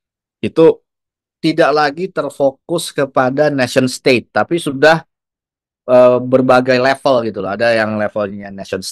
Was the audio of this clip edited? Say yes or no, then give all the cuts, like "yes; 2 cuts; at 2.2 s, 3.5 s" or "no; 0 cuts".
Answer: yes; 1 cut; at 1.3 s